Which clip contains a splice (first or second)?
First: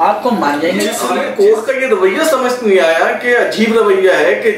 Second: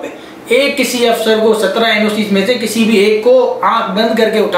first